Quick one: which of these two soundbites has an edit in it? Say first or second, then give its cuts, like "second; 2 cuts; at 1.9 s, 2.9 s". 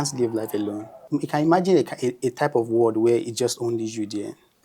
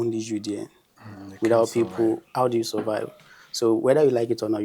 first; 1 cut; at 1.0 s